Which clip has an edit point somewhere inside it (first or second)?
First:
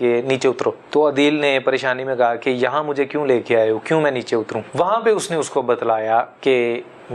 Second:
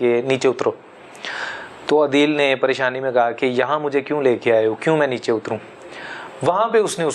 first